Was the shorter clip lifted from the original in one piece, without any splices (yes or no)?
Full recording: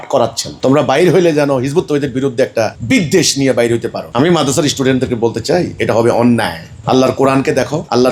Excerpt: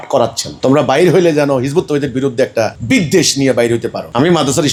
yes